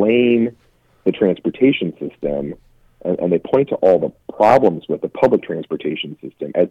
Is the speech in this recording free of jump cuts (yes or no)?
yes